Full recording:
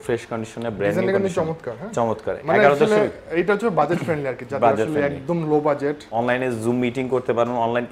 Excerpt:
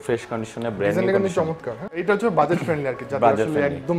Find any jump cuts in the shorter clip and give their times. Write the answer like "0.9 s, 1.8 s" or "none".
1.8 s